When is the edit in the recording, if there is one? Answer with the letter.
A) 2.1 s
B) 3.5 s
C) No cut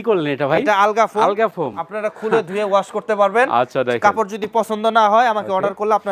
C